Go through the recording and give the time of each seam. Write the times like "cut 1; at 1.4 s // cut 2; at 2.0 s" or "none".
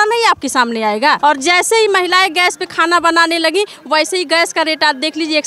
cut 1; at 1.2 s

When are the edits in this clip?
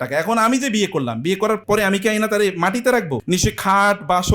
cut 1; at 1.6 s // cut 2; at 3.2 s

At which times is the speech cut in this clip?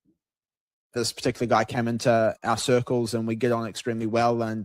cut 1; at 0.9 s // cut 2; at 2.4 s

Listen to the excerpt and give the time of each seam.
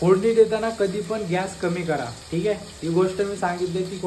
none

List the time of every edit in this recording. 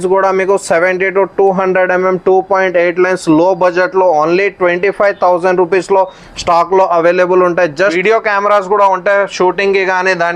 cut 1; at 8.0 s

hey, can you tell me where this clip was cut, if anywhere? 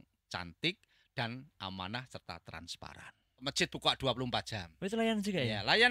cut 1; at 3.4 s

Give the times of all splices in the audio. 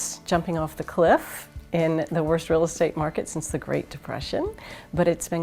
none

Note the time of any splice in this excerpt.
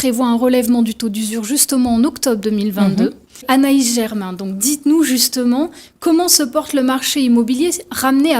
cut 1; at 3.4 s

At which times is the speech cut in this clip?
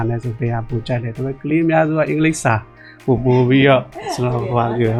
none

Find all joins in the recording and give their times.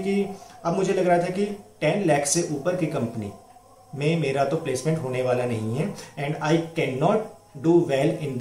none

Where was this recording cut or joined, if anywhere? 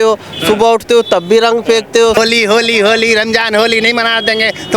cut 1; at 2.2 s

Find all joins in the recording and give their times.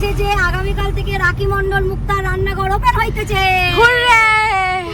none

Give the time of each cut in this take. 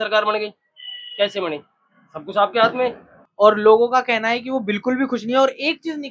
cut 1; at 3.2 s

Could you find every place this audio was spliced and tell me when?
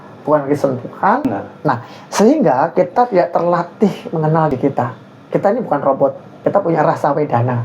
cut 1; at 1.2 s // cut 2; at 4.5 s // cut 3; at 6.3 s

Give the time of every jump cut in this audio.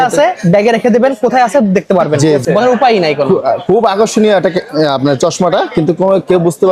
cut 1; at 2.4 s

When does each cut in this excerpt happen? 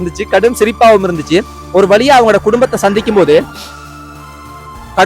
none

